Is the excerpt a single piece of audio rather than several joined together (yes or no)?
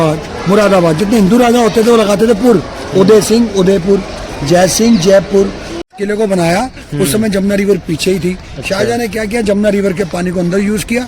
no